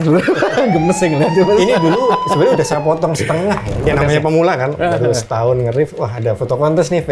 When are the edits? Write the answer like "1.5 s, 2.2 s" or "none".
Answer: 3.9 s